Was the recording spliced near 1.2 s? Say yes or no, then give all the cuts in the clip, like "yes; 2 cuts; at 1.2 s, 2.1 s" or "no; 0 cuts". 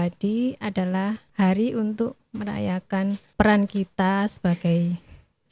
yes; 3 cuts; at 1.2 s, 2.2 s, 3.3 s